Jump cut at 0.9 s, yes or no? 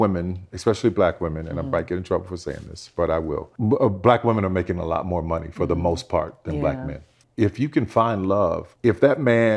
no